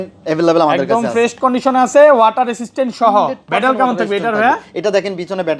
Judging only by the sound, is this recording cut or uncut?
uncut